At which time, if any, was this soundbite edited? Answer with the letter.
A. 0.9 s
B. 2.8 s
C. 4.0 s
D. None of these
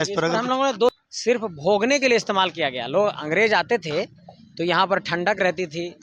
A